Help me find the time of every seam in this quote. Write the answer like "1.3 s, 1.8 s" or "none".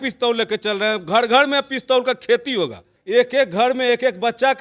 2.9 s